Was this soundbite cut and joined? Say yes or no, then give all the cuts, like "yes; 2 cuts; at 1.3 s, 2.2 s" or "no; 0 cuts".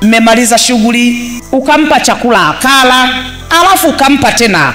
yes; 1 cut; at 1.3 s